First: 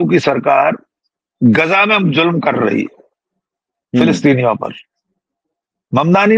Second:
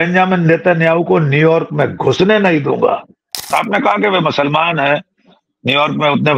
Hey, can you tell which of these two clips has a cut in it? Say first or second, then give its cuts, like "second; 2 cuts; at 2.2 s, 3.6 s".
second; 1 cut; at 3.5 s